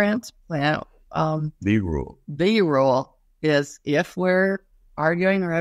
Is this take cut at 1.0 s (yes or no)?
no